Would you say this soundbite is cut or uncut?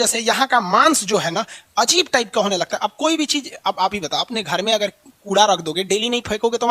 uncut